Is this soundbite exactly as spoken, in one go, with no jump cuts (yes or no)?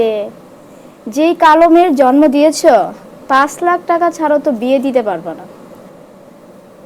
yes